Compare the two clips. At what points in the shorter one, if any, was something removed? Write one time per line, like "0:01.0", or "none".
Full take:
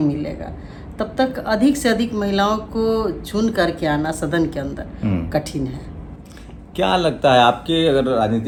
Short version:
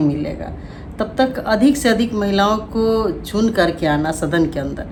none